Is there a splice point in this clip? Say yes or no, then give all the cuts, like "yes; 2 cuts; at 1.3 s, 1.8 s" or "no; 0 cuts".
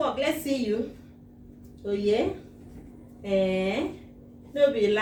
no; 0 cuts